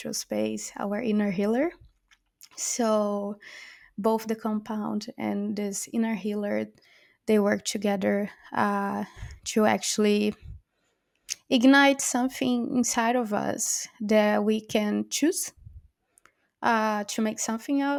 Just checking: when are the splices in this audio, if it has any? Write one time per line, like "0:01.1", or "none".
none